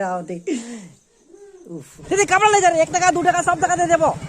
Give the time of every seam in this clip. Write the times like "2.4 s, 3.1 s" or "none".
1.9 s